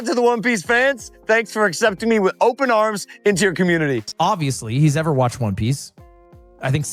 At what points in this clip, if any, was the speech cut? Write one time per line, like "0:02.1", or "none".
0:04.1